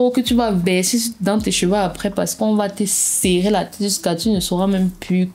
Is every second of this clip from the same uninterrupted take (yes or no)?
yes